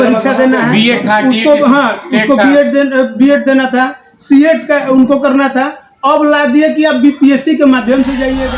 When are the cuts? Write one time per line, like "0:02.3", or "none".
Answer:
none